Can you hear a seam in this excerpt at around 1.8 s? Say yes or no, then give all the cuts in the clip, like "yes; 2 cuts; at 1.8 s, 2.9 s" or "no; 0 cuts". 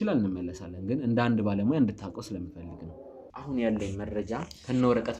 no; 1 cut; at 3.3 s